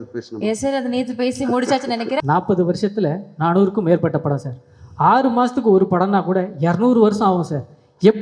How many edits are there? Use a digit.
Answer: 1